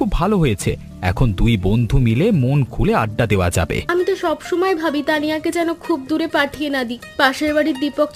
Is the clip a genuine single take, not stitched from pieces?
no; 1 cut; at 3.8 s

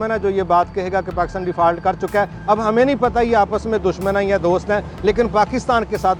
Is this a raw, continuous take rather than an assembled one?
yes; 0 cuts

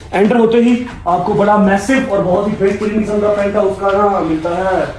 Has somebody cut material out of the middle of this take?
no; 0 cuts

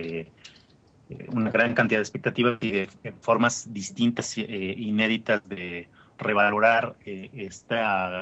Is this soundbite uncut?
yes; 0 cuts

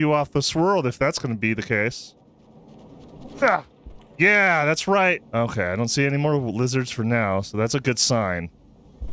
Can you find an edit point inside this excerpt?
no; 0 cuts

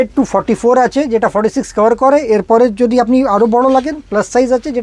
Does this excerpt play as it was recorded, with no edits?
yes; 0 cuts

